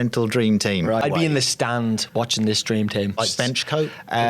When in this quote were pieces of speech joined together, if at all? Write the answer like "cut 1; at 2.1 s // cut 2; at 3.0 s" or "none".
cut 1; at 1.0 s // cut 2; at 3.2 s